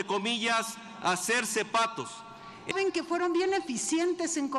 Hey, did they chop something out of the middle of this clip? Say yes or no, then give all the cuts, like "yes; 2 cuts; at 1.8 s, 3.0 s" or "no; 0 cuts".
yes; 1 cut; at 2.7 s